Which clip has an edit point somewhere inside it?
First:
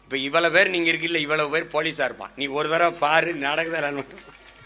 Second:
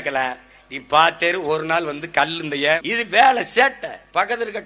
second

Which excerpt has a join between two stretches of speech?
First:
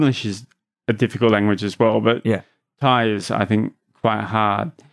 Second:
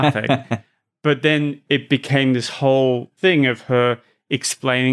second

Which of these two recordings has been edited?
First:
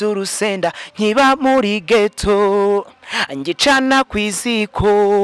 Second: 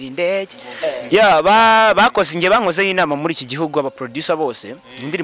second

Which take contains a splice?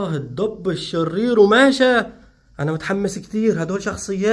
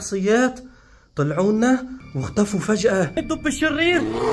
second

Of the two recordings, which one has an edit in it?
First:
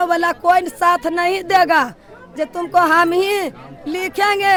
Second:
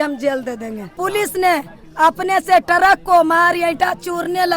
second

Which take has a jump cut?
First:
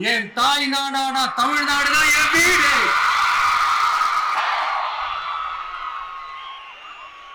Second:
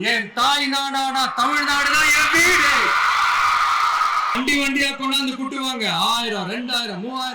second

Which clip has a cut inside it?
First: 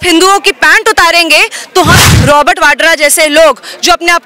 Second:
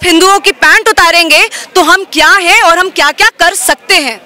first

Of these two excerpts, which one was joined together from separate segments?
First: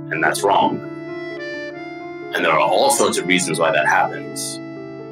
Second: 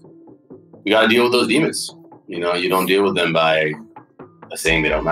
second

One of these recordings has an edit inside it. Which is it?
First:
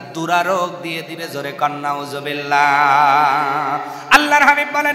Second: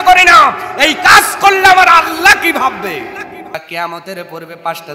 second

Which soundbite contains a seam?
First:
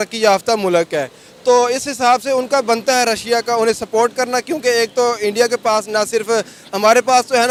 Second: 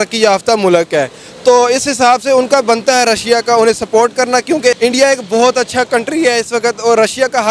second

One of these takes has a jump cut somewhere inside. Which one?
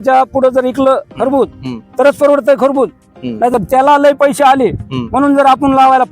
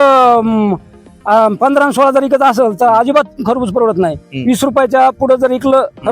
first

